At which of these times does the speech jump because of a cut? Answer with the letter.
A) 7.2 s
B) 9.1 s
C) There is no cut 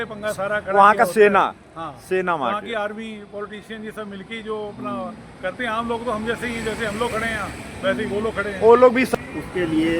B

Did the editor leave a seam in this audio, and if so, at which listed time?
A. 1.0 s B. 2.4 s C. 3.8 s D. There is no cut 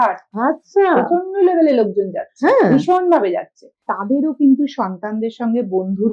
C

